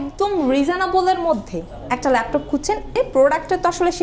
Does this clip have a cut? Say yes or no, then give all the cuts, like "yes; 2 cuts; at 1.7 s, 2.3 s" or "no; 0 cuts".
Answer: yes; 1 cut; at 3.0 s